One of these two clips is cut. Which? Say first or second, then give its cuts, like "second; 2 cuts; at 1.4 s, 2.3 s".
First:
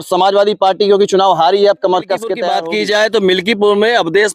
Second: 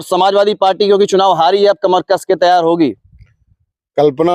first; 1 cut; at 2.5 s